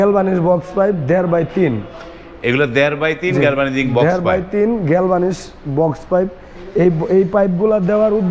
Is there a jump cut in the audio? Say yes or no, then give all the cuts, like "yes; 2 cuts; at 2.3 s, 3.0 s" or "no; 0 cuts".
no; 0 cuts